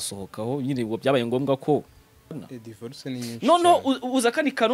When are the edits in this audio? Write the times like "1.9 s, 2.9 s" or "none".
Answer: 2.4 s

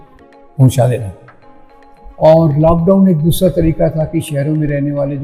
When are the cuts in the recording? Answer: none

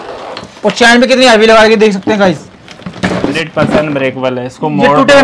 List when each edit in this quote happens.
3.4 s

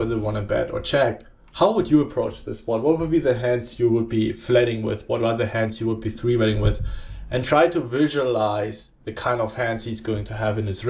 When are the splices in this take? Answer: none

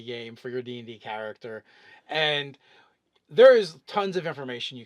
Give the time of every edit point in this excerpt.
2.6 s

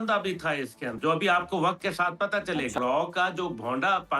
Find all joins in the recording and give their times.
0.9 s, 2.8 s

